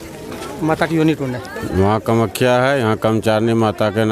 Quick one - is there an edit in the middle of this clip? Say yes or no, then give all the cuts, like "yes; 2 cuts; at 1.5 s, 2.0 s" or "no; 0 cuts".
no; 0 cuts